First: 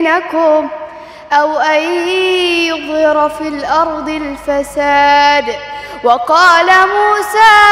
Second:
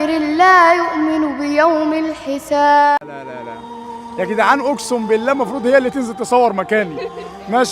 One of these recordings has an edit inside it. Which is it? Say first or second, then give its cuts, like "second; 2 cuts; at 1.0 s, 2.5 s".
second; 1 cut; at 2.9 s